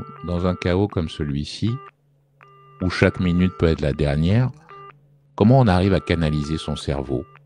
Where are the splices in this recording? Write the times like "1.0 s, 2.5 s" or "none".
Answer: none